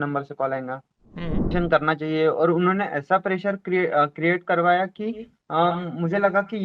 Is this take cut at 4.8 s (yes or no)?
no